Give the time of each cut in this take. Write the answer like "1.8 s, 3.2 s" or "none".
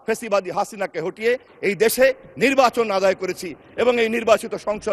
none